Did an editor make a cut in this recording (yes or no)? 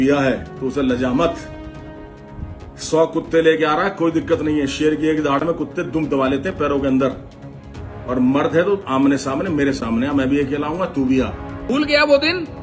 yes